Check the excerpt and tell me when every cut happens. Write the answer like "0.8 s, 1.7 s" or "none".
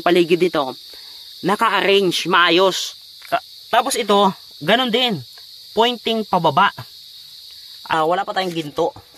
7.9 s